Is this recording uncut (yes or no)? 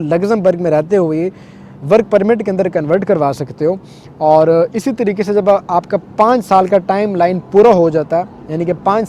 yes